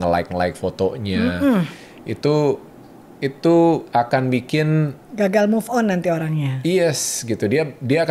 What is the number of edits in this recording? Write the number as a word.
zero